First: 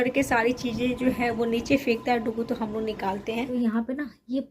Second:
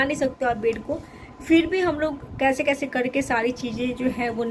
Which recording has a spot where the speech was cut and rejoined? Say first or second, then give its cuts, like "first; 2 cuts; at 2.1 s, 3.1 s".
first; 1 cut; at 3.5 s